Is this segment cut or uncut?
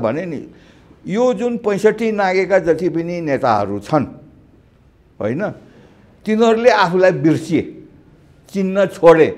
uncut